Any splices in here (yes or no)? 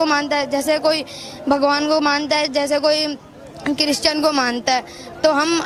no